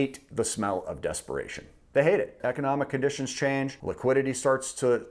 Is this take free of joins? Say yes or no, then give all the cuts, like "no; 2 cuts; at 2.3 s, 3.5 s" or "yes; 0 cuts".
no; 2 cuts; at 2.4 s, 3.8 s